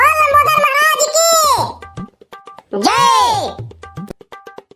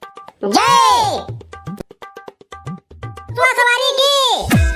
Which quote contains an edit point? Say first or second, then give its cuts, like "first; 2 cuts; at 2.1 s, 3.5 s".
second; 1 cut; at 3.4 s